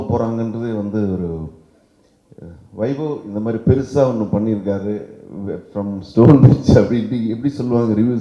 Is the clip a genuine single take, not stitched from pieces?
yes; 0 cuts

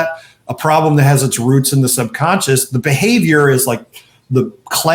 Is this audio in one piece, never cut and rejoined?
yes; 0 cuts

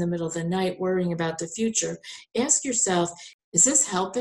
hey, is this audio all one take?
no; 1 cut; at 3.2 s

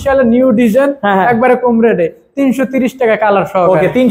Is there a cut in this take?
no; 0 cuts

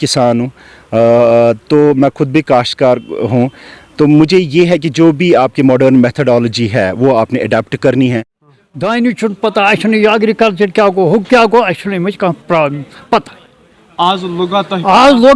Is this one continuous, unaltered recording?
no; 1 cut; at 8.4 s

